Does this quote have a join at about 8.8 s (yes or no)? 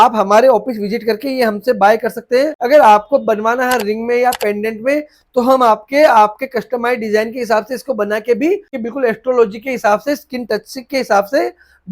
yes